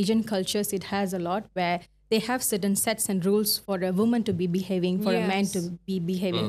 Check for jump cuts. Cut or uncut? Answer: uncut